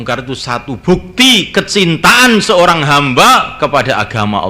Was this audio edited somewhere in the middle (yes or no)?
no